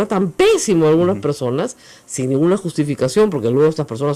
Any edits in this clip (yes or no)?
no